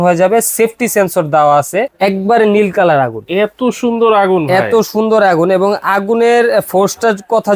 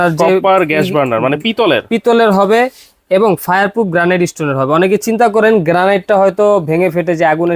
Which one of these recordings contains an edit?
first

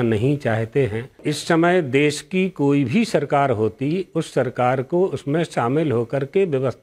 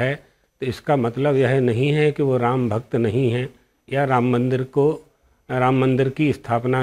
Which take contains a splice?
first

